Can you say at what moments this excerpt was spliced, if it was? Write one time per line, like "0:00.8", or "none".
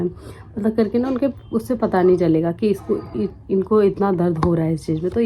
none